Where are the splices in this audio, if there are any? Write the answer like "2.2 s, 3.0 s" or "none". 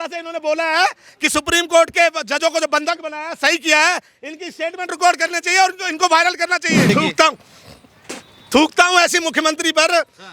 6.9 s